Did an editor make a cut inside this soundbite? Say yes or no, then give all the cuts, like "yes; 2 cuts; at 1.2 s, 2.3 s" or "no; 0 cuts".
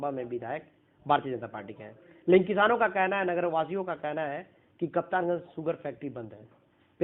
no; 0 cuts